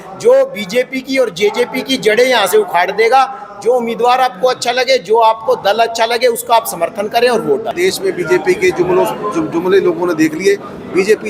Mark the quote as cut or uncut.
cut